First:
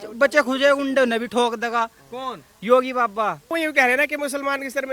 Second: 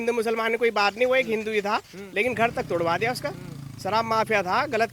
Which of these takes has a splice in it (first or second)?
first